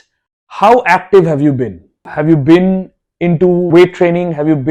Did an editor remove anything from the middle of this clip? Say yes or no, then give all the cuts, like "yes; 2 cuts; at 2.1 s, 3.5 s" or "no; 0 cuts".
no; 0 cuts